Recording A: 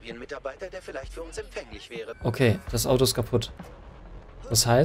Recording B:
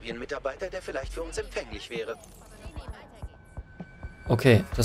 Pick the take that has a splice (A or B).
A